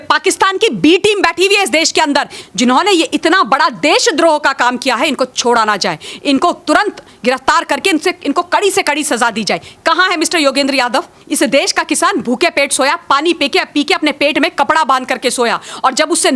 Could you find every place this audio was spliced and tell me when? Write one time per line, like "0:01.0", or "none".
0:02.4
0:11.2

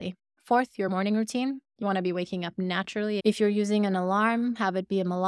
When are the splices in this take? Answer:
0:03.2

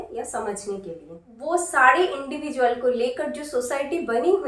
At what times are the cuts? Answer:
0:01.1

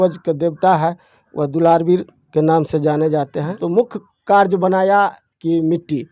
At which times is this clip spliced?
0:03.5

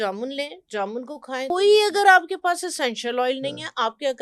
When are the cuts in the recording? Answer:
0:01.5

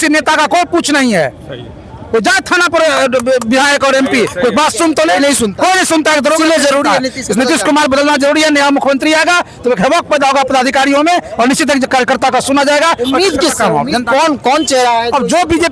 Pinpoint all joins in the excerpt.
none

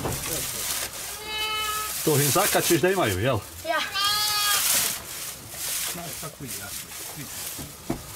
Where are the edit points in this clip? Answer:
none

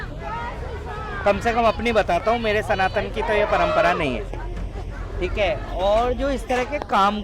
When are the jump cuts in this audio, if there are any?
none

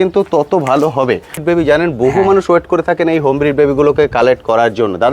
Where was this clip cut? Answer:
0:01.4

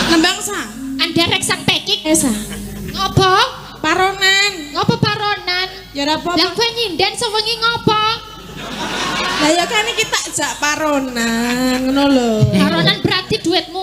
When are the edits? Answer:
0:02.1

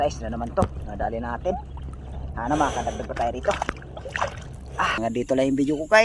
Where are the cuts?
0:05.0

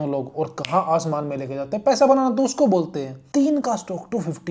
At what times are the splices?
0:03.2

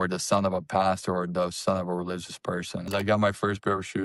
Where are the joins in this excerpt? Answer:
0:02.9

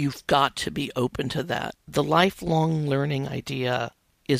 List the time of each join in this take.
0:01.8

